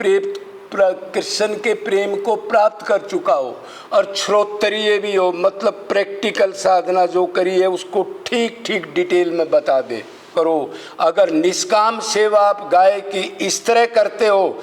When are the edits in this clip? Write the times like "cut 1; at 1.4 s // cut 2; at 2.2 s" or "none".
cut 1; at 10.3 s